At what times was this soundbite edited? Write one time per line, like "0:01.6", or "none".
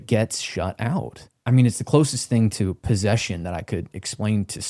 0:01.3